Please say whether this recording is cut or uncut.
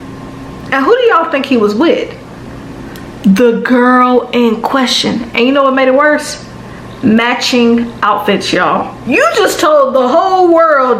cut